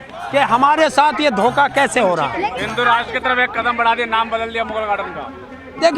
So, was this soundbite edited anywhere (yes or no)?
no